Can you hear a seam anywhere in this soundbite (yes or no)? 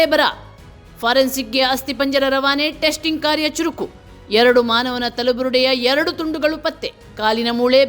no